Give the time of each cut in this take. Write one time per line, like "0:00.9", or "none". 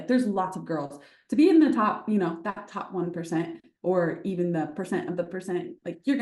none